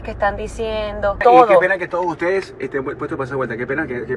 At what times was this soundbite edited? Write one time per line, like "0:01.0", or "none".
0:01.2